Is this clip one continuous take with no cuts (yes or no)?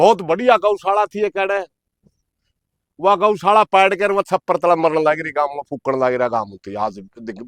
yes